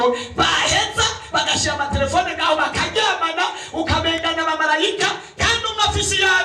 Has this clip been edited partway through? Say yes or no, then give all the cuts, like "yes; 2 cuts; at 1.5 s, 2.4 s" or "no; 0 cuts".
no; 0 cuts